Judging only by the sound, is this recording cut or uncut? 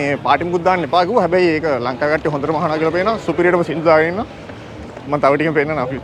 uncut